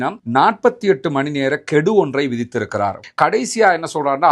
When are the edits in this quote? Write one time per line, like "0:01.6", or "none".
0:03.0